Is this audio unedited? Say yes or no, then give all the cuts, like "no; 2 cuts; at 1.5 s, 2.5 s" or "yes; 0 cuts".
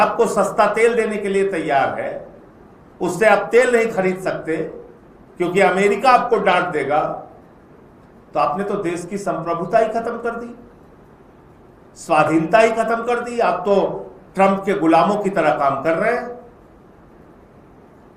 yes; 0 cuts